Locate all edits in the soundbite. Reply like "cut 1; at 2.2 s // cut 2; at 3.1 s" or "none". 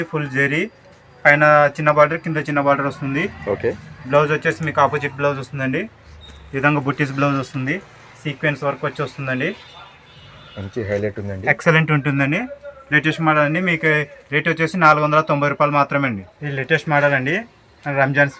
cut 1; at 16.2 s